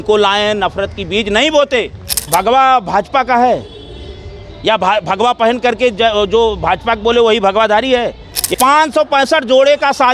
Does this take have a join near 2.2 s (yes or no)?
yes